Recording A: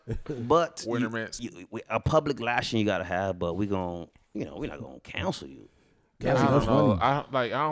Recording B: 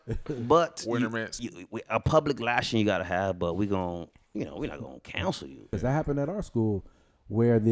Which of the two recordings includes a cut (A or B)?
B